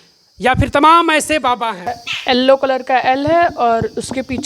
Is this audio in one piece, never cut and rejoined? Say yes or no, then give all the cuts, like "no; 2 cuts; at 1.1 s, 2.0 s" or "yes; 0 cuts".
no; 1 cut; at 1.9 s